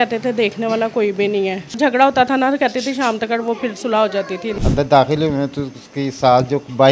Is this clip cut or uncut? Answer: cut